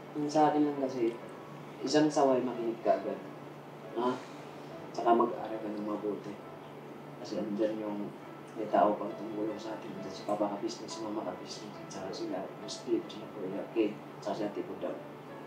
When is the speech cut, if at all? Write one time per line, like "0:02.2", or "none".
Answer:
none